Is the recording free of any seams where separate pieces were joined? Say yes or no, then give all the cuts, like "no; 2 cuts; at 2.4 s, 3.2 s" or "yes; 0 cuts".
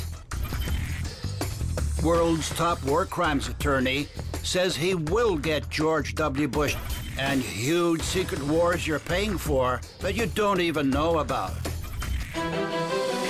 no; 1 cut; at 9.9 s